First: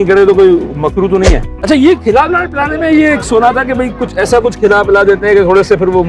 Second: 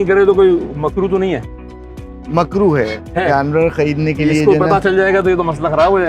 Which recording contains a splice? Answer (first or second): first